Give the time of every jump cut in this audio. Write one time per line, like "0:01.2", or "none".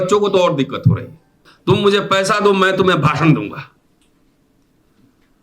0:01.5